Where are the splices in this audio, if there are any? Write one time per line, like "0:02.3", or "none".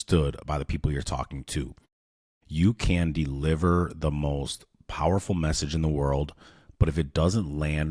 none